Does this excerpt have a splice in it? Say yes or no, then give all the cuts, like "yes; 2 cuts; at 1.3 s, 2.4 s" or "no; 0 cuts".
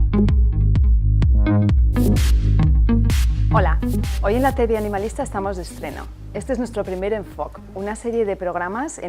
no; 0 cuts